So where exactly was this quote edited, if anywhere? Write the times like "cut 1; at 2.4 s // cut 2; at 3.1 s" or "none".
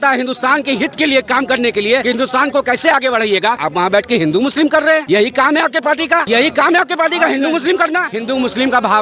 cut 1; at 2.0 s // cut 2; at 3.6 s // cut 3; at 5.0 s // cut 4; at 6.2 s // cut 5; at 8.1 s